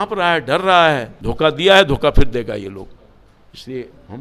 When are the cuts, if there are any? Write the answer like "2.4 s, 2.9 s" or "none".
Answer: 1.2 s